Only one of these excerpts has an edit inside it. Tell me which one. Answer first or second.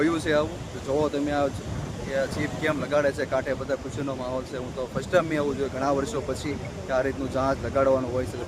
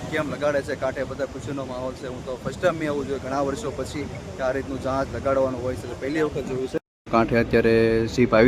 second